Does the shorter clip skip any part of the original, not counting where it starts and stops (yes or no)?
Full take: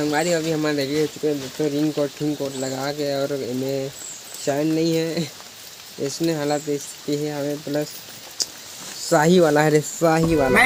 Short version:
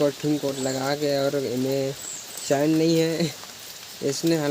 no